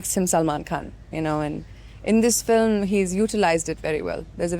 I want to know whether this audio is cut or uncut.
uncut